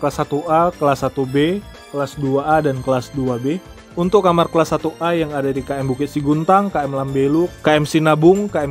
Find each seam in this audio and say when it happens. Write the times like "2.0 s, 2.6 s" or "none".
none